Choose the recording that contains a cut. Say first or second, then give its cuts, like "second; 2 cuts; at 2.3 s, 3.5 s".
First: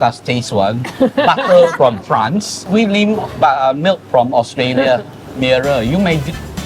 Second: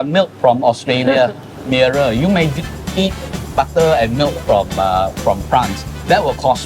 first; 1 cut; at 2.6 s